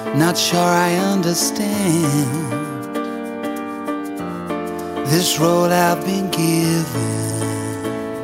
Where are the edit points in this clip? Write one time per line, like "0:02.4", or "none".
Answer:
none